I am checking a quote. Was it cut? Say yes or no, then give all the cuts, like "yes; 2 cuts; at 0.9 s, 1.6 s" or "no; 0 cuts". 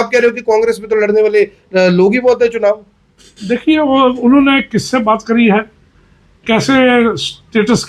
no; 0 cuts